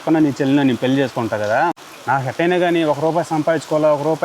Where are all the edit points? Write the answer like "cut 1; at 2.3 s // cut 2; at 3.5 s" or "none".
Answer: cut 1; at 1.8 s